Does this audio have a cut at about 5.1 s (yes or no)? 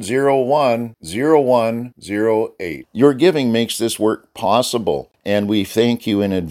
yes